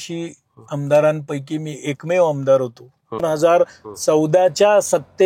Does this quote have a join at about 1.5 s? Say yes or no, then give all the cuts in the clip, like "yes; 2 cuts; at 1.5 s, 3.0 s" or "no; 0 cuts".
no; 1 cut; at 3.2 s